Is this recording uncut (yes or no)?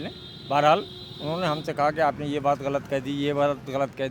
yes